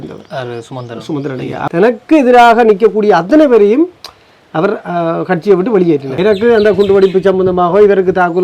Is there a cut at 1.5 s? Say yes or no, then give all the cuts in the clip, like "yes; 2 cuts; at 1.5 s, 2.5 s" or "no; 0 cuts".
yes; 2 cuts; at 1.5 s, 6.1 s